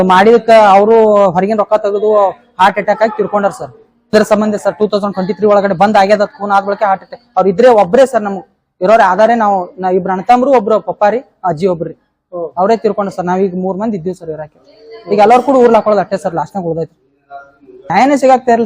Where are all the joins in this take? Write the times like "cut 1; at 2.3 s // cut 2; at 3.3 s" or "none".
cut 1; at 4.1 s // cut 2; at 17.9 s

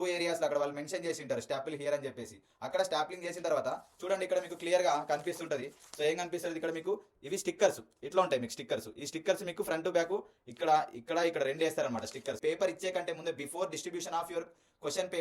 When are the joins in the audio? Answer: cut 1; at 12.4 s

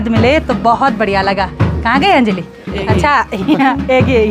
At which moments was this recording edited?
none

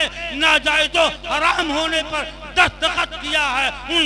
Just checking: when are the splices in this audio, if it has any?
none

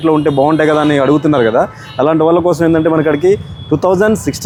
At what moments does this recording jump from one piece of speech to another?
none

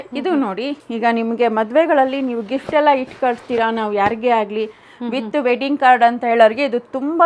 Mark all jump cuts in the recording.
none

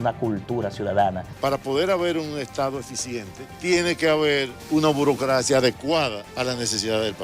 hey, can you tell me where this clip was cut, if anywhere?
cut 1; at 1.3 s // cut 2; at 3.4 s // cut 3; at 6.2 s

